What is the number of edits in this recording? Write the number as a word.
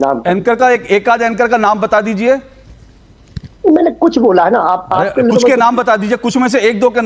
zero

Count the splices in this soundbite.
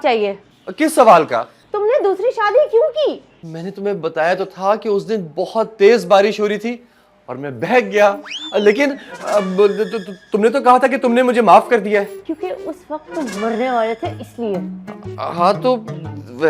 zero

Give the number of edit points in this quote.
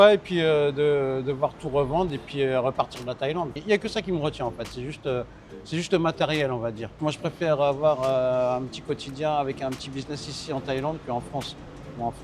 two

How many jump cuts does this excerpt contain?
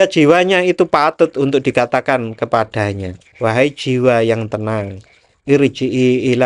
one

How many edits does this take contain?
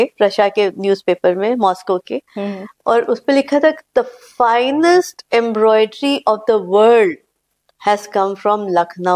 zero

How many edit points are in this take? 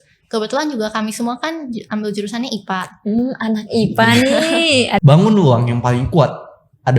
one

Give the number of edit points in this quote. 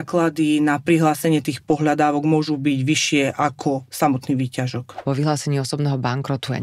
one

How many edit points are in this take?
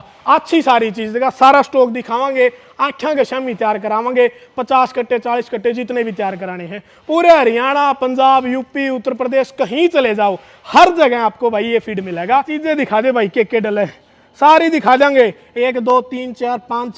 one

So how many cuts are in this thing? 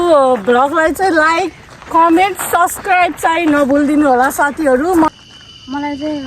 one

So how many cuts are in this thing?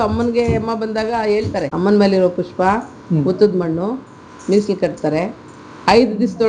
one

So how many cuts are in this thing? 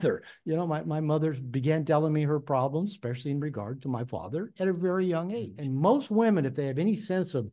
one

